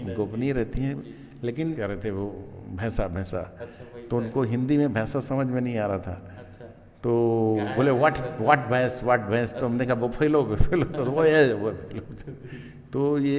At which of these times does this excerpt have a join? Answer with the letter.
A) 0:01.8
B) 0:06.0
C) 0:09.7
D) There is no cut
A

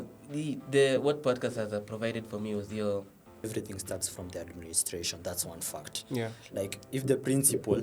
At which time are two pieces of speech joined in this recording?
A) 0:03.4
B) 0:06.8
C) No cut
A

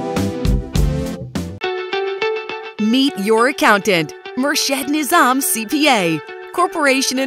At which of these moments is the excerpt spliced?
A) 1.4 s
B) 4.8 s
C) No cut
A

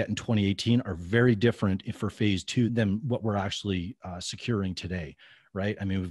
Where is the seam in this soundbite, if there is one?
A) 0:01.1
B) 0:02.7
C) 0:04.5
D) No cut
B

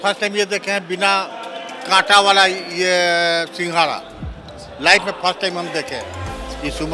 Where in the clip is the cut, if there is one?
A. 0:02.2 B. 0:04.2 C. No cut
C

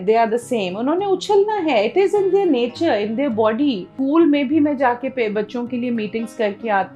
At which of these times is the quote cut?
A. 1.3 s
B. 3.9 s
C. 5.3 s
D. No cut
B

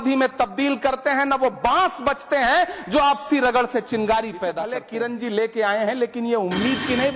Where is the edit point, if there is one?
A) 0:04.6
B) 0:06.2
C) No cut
A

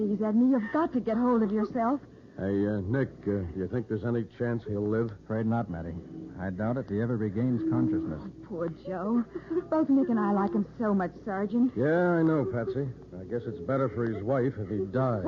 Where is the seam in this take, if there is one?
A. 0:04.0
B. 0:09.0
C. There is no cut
B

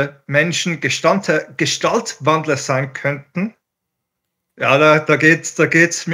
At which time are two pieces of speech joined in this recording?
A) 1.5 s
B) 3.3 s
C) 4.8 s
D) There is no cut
D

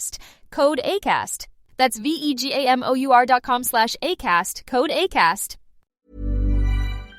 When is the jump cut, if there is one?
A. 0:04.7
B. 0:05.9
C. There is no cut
B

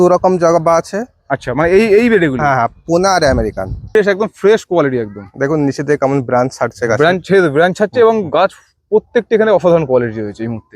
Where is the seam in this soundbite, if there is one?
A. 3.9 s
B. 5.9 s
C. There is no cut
A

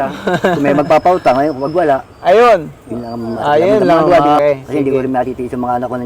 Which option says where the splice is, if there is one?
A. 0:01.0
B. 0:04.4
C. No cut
B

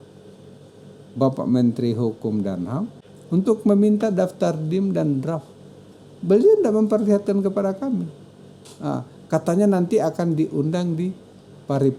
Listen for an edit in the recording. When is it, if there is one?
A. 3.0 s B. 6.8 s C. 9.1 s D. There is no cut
A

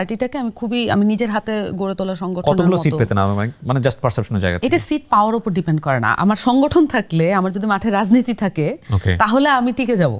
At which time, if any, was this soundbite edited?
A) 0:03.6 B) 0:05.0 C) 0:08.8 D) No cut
D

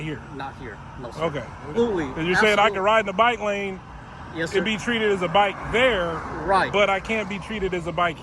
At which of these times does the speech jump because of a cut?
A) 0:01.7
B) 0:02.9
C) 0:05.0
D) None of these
A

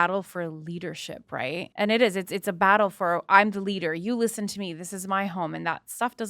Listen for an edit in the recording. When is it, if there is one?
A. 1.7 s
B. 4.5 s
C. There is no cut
A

